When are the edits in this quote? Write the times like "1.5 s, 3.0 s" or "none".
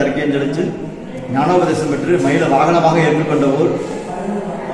none